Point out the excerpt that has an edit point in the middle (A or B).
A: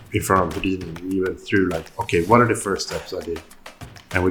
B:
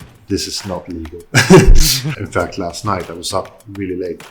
B